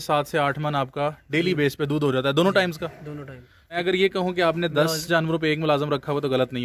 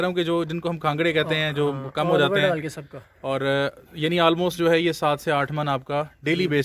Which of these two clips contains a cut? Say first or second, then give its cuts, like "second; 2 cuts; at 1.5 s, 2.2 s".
first; 1 cut; at 3.8 s